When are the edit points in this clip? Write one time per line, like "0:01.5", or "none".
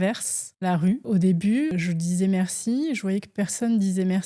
0:00.9
0:01.7